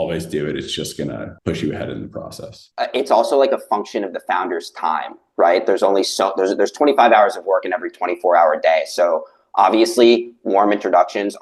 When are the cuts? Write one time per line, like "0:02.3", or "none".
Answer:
none